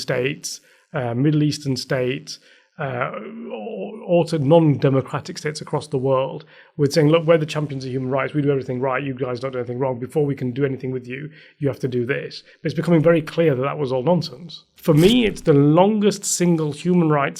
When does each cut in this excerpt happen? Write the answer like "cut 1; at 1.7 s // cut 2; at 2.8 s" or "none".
cut 1; at 14.7 s